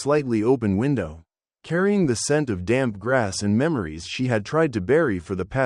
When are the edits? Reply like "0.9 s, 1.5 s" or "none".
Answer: 3.5 s